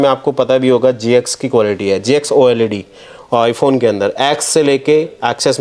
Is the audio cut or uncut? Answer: uncut